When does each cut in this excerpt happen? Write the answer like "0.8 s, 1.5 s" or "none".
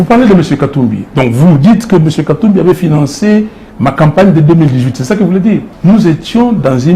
5.7 s